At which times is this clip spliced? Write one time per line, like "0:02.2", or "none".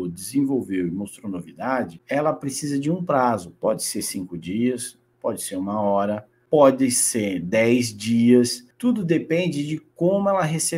0:06.3
0:08.6